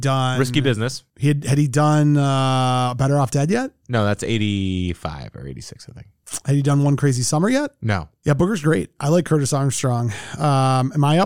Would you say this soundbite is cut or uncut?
cut